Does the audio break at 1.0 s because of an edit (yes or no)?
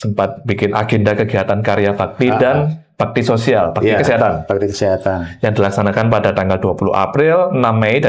no